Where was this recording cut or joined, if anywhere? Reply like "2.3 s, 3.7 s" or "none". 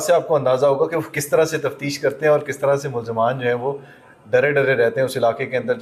none